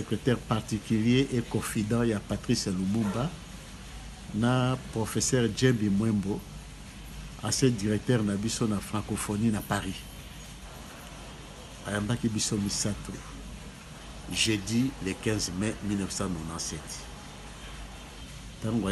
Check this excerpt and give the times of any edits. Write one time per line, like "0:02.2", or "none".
none

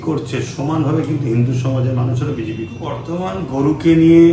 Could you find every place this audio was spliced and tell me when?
0:03.1

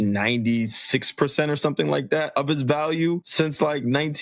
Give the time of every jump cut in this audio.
0:02.3
0:03.3

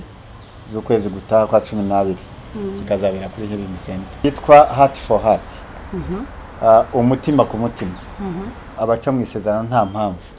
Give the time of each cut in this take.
0:04.2
0:08.7

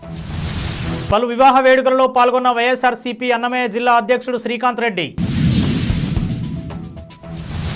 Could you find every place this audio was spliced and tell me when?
0:01.1

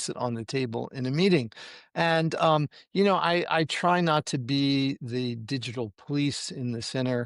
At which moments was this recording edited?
none

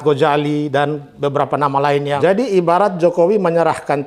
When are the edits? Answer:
0:02.2

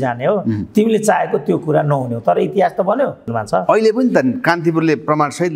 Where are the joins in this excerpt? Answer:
0:03.2

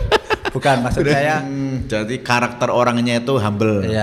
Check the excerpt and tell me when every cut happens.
0:01.5

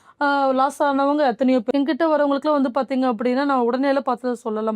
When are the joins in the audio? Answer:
0:01.7

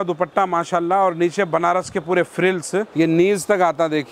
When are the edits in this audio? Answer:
0:02.9

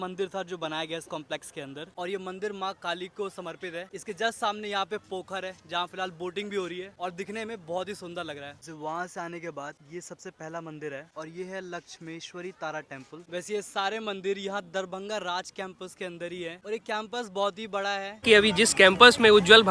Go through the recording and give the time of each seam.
none

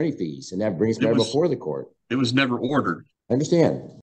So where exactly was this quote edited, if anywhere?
0:01.9
0:03.1

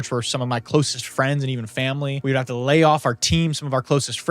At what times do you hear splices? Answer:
0:02.1

